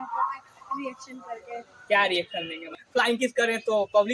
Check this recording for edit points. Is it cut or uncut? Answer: cut